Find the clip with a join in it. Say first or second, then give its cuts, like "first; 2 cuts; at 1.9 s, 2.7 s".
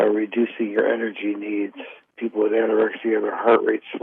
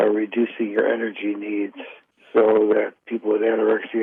first; 1 cut; at 2.1 s